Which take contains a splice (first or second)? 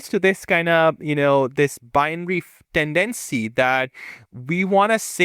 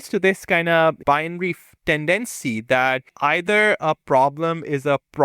second